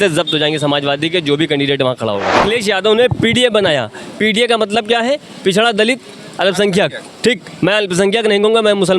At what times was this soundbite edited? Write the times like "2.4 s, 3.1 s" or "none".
2.3 s